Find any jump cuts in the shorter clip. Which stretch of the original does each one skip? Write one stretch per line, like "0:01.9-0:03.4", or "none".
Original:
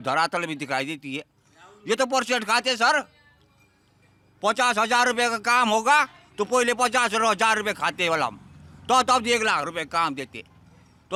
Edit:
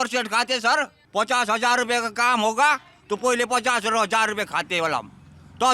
0:03.1-0:04.3